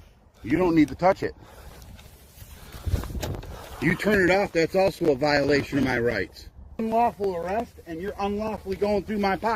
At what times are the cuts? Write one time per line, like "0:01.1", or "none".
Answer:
0:06.8